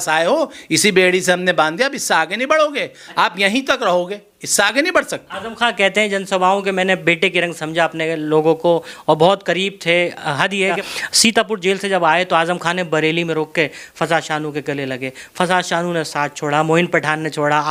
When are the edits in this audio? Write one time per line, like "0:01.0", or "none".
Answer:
none